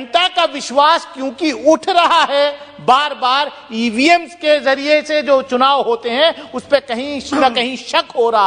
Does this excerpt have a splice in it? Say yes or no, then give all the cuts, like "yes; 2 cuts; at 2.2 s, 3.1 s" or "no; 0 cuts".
no; 0 cuts